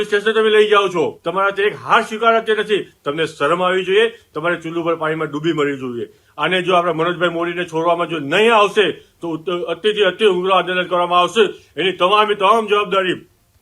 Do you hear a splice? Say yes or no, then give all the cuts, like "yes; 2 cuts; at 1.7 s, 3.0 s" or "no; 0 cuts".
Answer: yes; 2 cuts; at 1.2 s, 6.3 s